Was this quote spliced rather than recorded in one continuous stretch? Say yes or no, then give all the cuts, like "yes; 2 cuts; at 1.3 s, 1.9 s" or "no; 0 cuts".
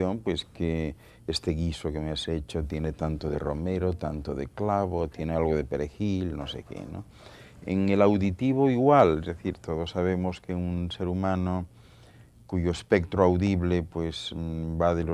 yes; 1 cut; at 4.3 s